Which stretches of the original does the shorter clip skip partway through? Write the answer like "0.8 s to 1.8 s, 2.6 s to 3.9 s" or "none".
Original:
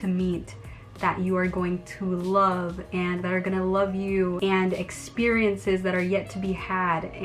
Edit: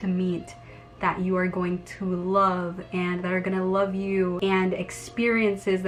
none